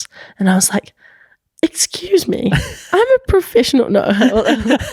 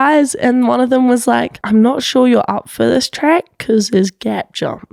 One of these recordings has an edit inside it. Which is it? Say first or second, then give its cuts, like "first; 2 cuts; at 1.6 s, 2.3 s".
second; 1 cut; at 1.6 s